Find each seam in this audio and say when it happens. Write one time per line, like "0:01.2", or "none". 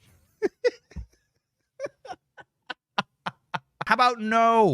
0:03.8